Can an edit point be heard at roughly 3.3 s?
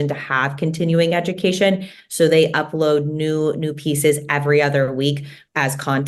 no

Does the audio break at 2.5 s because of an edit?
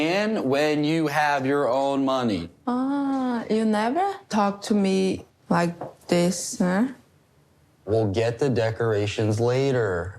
no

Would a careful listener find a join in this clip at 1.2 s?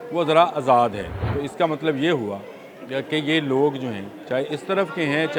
yes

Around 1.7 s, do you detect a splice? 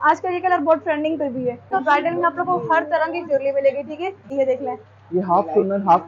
yes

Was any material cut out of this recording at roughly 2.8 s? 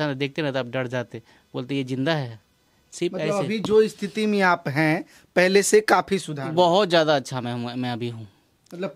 no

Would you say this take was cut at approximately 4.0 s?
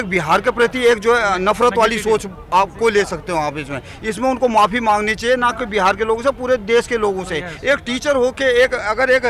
no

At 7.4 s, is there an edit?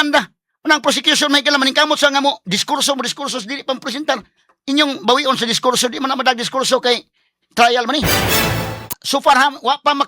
no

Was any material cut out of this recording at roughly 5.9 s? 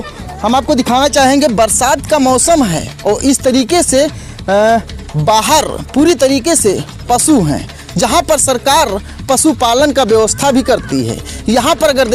no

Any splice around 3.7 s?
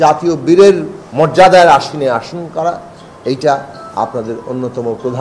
no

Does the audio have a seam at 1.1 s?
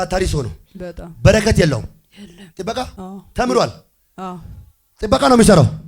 no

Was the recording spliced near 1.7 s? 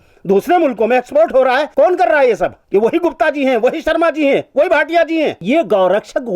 yes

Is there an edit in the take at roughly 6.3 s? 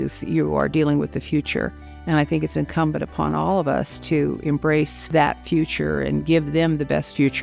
no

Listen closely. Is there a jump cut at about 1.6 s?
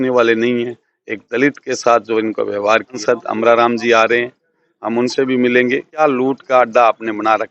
no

